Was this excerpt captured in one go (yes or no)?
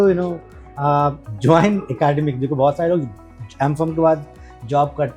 yes